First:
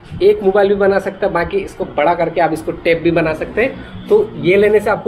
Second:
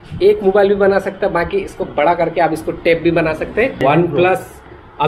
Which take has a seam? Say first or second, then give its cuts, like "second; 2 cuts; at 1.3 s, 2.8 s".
second; 1 cut; at 3.8 s